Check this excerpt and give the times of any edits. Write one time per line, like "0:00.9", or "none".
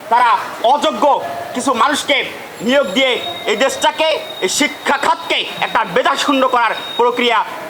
none